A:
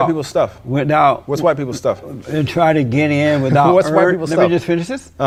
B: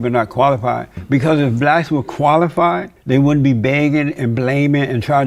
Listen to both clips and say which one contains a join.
B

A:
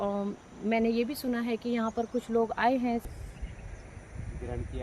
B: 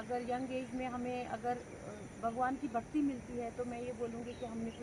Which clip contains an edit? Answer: A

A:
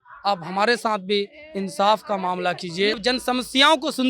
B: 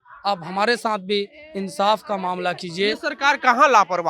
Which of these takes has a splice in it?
A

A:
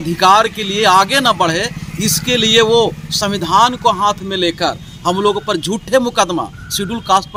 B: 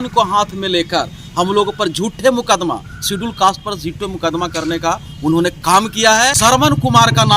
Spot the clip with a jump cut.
B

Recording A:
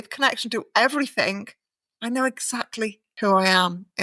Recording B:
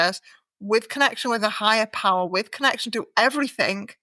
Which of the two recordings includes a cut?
A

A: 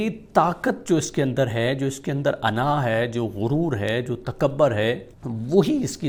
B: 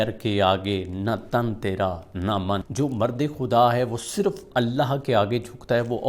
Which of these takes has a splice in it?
B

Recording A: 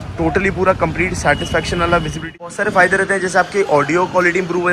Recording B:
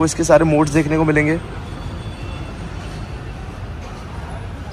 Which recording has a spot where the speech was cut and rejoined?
A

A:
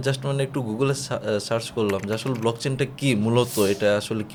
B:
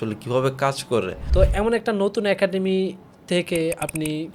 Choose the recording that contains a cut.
B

